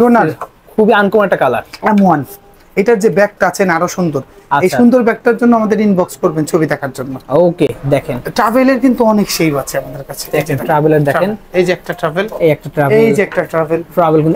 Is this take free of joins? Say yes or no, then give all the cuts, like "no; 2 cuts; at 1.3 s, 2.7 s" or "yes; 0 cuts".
yes; 0 cuts